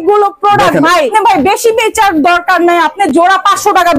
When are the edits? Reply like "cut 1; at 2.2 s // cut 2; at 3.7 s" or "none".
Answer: cut 1; at 1.1 s